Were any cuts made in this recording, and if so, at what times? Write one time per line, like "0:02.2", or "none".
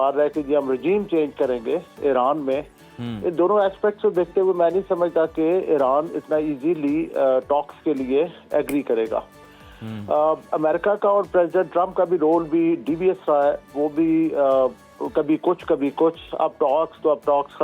none